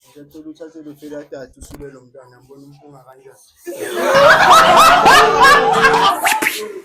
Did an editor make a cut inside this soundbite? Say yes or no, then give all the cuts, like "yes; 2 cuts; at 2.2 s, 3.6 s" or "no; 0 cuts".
no; 0 cuts